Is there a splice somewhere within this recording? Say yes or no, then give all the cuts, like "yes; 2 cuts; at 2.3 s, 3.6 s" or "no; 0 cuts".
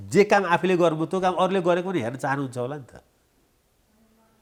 no; 0 cuts